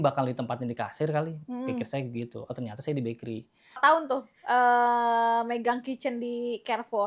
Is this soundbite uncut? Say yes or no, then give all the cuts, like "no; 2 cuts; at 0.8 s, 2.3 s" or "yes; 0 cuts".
no; 1 cut; at 3.8 s